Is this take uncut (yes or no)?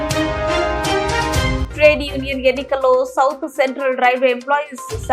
no